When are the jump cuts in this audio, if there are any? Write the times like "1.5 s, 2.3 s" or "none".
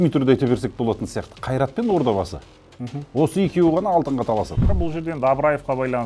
4.6 s